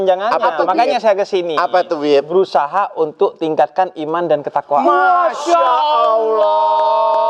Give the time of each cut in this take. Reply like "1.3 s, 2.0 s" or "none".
none